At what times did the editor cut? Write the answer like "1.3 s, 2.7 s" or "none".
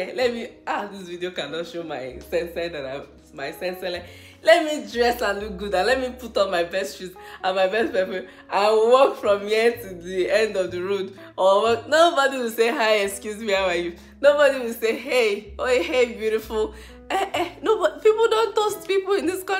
none